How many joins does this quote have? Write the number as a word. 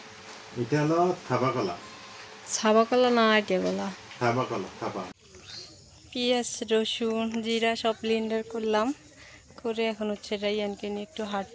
one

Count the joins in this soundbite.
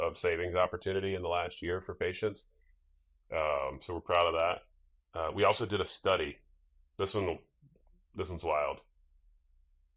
zero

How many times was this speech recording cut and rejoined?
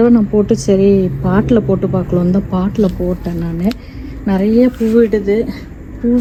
zero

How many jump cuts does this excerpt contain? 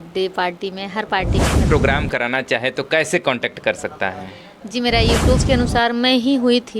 two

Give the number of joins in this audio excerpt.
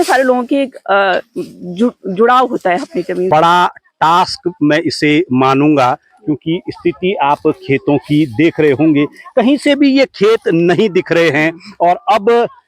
one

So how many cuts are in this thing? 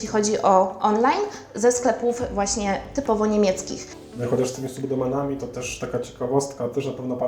one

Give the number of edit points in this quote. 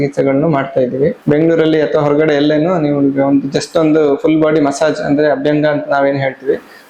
one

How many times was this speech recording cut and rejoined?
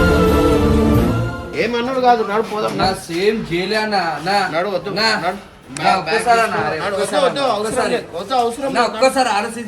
one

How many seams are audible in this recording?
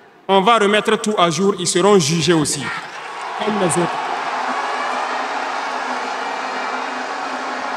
zero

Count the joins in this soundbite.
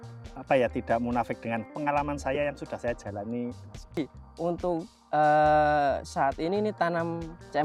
two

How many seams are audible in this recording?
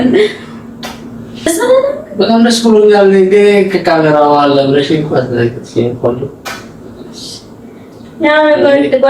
one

